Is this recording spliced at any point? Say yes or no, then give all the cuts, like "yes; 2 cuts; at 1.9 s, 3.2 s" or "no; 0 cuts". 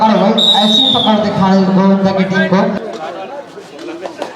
yes; 1 cut; at 2.8 s